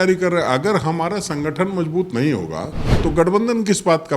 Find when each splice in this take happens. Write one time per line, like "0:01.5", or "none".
0:03.0